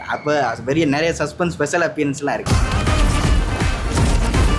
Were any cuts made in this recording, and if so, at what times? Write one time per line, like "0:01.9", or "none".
0:02.4